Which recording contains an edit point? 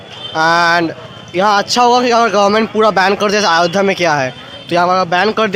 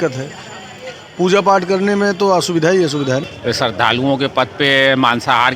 second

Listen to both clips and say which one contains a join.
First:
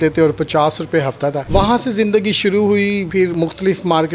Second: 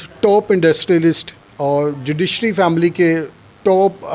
first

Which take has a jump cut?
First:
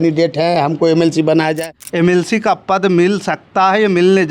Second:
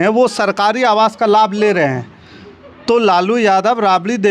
first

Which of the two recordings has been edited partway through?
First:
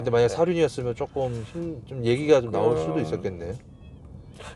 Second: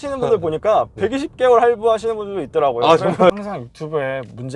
second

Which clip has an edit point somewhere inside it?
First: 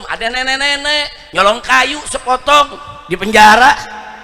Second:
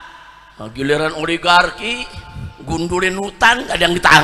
first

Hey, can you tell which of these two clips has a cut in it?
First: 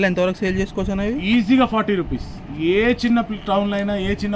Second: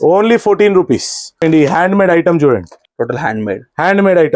second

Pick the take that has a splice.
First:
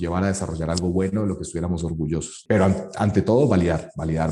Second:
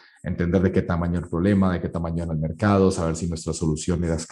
first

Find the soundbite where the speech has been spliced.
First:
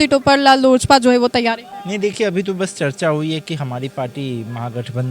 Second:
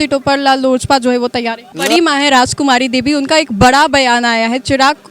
second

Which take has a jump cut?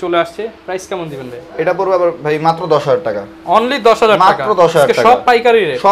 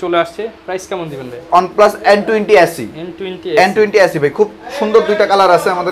second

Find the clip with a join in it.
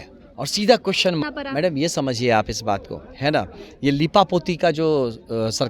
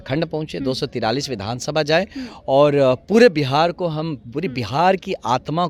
first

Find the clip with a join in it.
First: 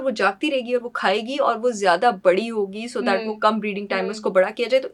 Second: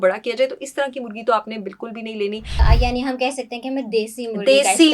second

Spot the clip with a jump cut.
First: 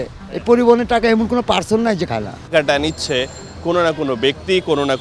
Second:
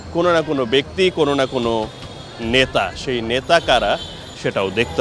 first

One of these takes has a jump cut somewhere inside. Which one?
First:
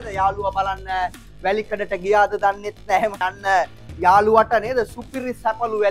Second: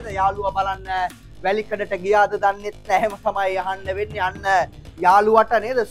first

